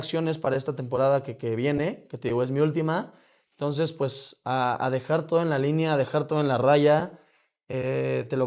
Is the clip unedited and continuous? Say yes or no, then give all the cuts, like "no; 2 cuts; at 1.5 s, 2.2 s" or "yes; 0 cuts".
yes; 0 cuts